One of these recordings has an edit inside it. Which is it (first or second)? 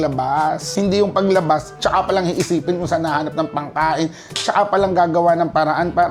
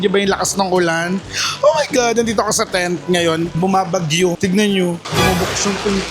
second